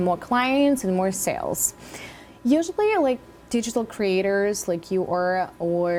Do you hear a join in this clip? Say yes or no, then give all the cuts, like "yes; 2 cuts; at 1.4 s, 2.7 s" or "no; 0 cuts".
no; 0 cuts